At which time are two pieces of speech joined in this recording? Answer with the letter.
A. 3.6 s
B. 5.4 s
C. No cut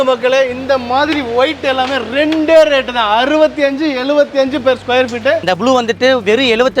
B